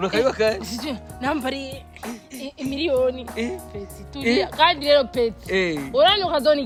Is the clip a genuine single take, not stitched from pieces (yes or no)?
yes